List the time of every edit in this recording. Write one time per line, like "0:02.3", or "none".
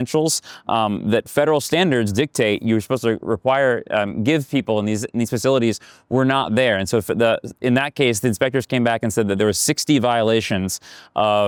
none